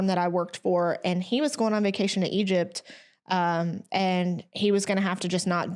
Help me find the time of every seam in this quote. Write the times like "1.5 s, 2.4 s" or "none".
none

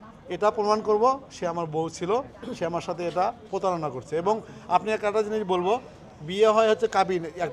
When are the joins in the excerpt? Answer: none

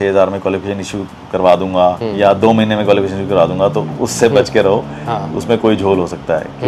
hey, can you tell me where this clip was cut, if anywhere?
none

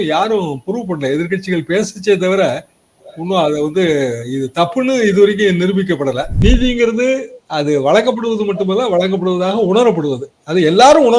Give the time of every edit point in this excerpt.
6.3 s

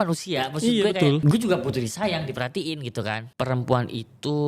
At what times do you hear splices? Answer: 3.2 s

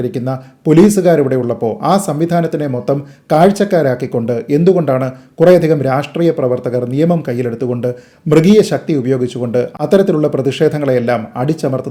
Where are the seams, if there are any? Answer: none

